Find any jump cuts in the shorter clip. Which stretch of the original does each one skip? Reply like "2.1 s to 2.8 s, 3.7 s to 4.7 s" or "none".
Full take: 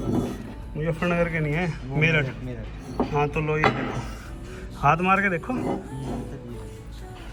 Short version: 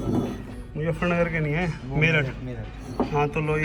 none